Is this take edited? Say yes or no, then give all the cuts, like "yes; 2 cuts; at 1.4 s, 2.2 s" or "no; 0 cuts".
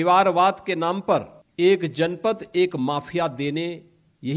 yes; 1 cut; at 1.4 s